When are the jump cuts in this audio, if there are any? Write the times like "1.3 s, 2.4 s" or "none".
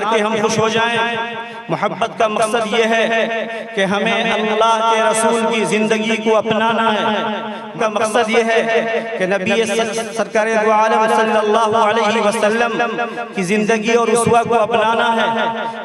7.7 s